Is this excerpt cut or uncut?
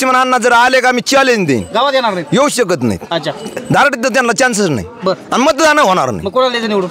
uncut